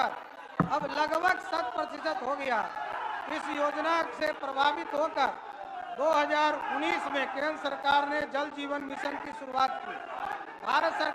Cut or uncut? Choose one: uncut